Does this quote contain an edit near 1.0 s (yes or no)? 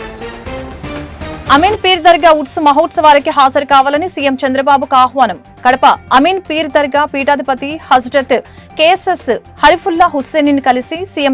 yes